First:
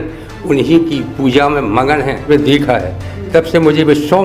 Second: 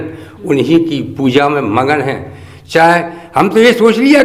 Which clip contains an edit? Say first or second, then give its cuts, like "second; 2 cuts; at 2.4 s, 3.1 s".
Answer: first; 1 cut; at 2.2 s